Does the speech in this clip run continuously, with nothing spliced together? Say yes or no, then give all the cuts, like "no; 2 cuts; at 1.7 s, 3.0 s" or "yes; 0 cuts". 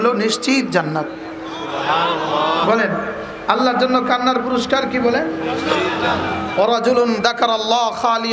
yes; 0 cuts